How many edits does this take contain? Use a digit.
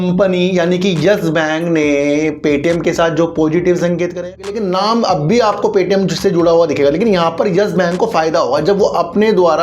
1